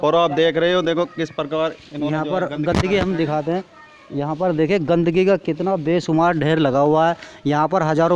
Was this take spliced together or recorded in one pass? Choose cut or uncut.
uncut